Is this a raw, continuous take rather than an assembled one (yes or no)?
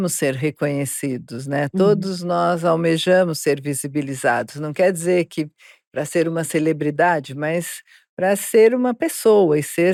yes